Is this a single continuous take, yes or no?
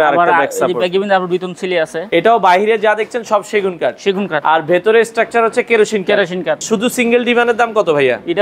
no